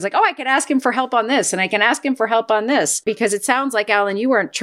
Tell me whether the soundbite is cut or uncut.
cut